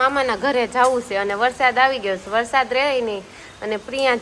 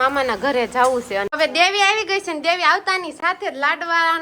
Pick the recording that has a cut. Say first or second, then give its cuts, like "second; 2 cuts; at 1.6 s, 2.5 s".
second; 1 cut; at 1.3 s